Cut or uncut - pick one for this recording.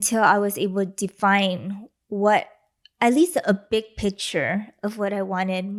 uncut